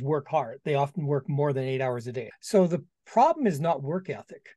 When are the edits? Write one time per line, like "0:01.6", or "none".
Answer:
0:02.3